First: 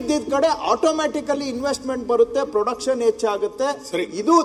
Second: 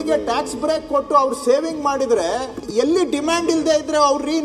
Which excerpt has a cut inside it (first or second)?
second